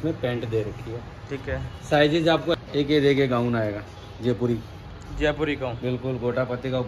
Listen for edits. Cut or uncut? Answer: cut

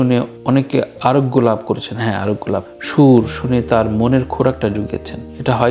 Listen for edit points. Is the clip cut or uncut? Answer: uncut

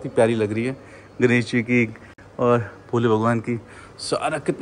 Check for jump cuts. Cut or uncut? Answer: uncut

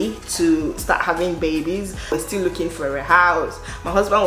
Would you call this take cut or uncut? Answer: uncut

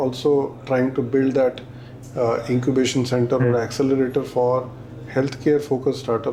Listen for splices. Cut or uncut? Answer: uncut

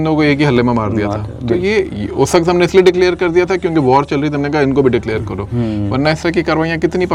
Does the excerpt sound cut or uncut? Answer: uncut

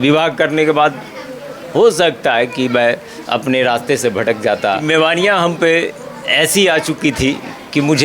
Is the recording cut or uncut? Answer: cut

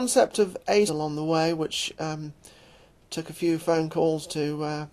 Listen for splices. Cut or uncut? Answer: uncut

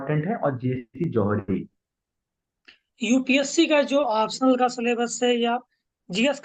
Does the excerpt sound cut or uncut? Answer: cut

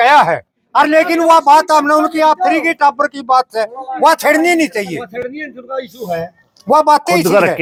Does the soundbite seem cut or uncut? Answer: uncut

